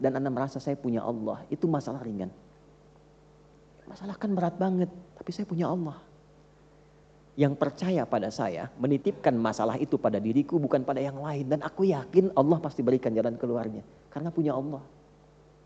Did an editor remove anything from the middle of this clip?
no; 0 cuts

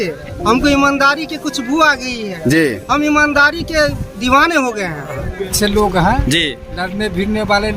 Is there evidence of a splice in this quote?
yes; 1 cut; at 5.5 s

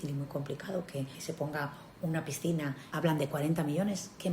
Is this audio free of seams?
no; 2 cuts; at 1.2 s, 2.8 s

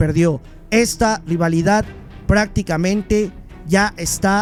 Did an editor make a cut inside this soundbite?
no; 0 cuts

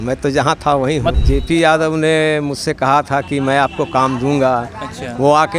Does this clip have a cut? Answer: yes; 1 cut; at 1.2 s

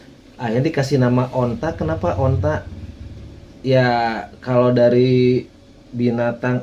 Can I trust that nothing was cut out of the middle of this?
yes; 0 cuts

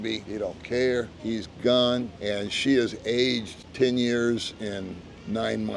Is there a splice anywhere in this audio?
no; 0 cuts

